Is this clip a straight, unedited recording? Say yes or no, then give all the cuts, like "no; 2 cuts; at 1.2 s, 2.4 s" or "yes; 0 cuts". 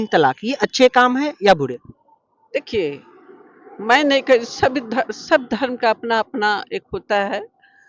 yes; 0 cuts